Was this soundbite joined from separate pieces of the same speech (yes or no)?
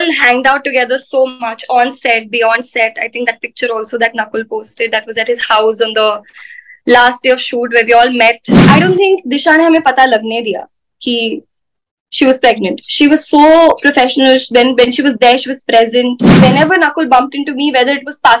yes